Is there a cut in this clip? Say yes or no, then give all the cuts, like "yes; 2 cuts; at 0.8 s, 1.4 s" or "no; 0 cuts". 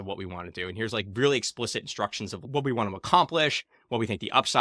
yes; 1 cut; at 2.5 s